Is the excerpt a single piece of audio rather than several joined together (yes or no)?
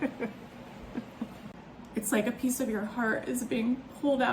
no